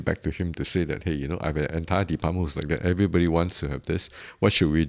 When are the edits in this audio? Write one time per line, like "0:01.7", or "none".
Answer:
none